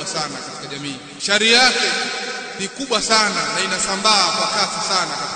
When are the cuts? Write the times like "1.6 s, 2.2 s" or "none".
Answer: 1.1 s, 2.5 s

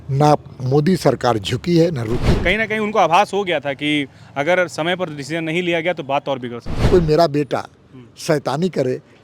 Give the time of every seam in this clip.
2.3 s, 6.9 s

